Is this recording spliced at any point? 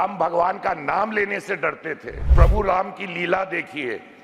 yes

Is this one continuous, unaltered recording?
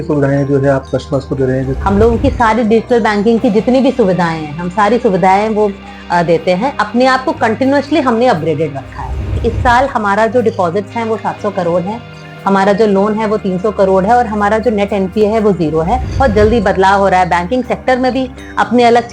no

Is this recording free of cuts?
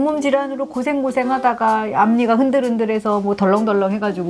yes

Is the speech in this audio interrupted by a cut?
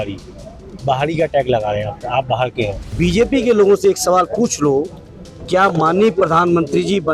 yes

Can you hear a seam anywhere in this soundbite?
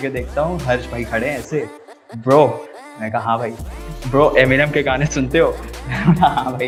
no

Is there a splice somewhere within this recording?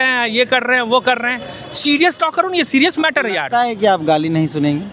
no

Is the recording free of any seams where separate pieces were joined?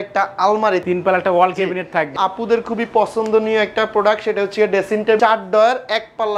no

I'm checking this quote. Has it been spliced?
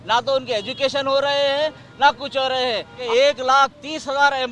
yes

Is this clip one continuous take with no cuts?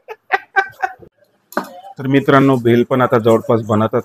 no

